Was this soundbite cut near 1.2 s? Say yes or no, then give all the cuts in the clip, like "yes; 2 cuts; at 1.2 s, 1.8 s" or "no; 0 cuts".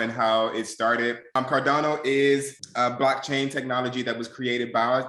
yes; 2 cuts; at 1.2 s, 2.6 s